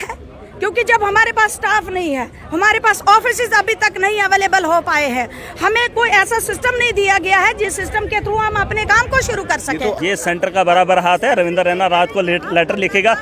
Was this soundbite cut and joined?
yes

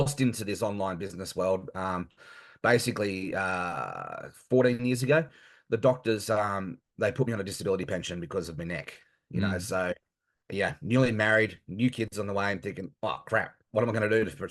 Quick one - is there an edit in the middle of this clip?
no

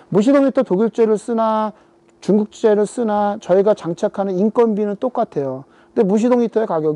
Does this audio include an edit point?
no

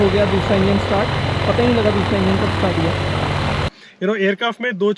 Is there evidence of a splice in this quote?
yes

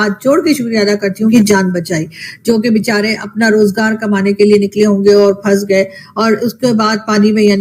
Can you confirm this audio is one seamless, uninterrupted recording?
no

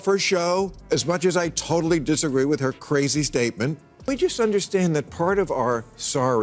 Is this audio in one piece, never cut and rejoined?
no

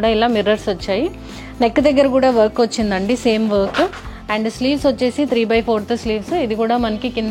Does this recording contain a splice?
no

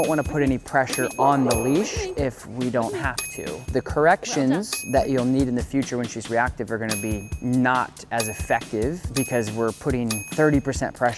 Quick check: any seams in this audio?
yes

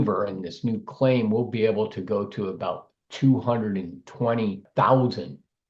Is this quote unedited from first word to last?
no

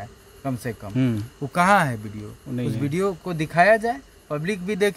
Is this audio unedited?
yes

